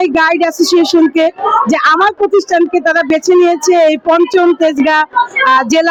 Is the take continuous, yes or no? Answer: yes